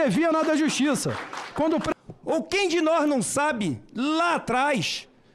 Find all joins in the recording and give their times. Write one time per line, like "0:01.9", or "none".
0:01.9